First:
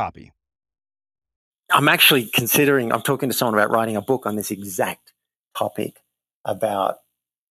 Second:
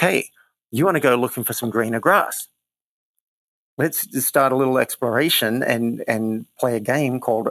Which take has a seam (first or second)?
first